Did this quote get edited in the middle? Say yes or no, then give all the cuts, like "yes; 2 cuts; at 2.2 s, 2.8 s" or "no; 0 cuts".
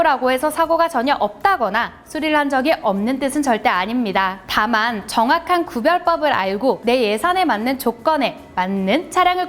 no; 0 cuts